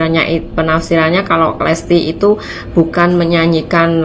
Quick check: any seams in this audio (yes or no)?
no